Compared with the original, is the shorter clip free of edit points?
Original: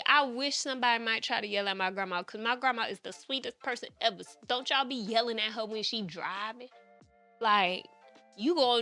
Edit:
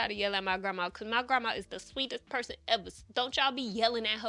yes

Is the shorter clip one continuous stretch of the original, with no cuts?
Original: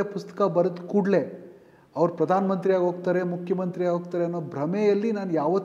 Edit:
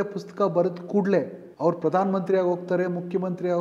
no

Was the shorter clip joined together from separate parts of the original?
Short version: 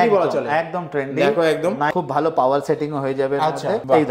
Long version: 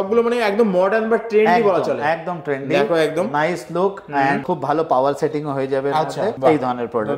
yes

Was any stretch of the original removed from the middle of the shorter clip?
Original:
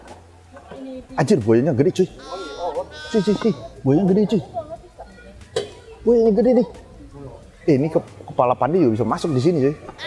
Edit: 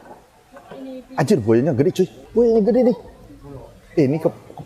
yes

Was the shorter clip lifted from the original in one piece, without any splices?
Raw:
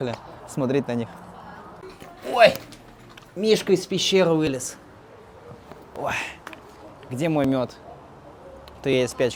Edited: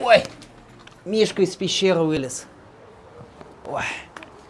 yes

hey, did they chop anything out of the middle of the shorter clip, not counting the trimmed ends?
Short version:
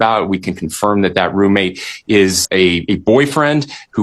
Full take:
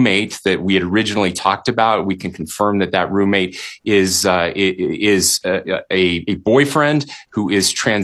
yes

